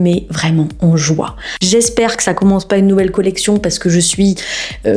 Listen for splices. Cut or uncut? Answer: cut